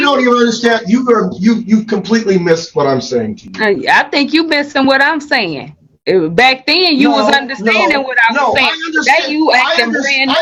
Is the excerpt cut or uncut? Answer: uncut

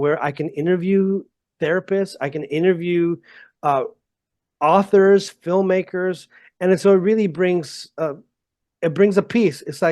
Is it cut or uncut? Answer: uncut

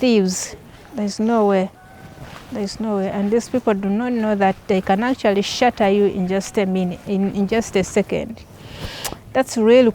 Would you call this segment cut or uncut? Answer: uncut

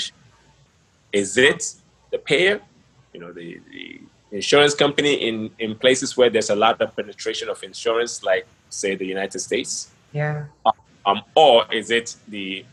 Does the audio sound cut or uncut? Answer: uncut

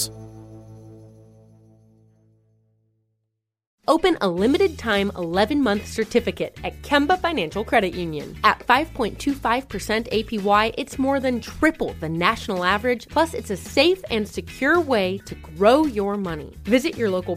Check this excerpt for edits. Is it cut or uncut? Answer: cut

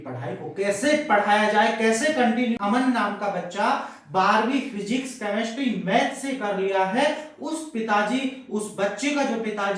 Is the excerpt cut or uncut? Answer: cut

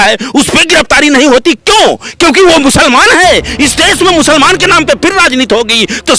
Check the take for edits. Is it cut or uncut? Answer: uncut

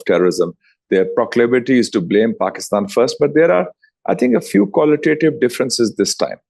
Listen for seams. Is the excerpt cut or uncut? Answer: uncut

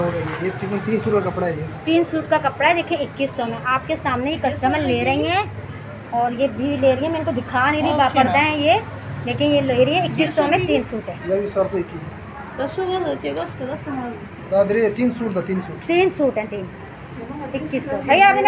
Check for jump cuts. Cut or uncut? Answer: uncut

